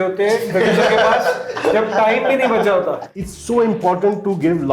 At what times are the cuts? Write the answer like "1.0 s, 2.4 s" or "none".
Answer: 3.1 s